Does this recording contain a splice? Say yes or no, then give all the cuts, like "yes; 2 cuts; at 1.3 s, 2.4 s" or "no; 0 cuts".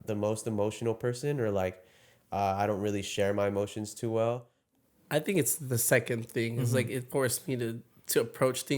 yes; 1 cut; at 4.6 s